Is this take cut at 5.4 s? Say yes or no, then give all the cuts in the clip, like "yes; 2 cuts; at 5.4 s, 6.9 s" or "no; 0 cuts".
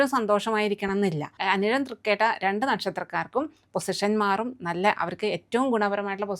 no; 1 cut; at 1.3 s